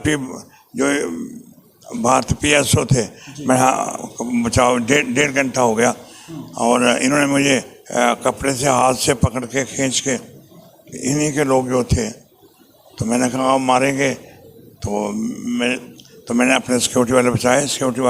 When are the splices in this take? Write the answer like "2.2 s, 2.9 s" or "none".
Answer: none